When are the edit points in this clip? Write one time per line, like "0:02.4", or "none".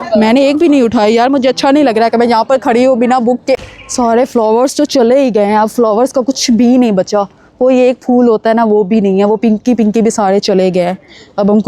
0:03.7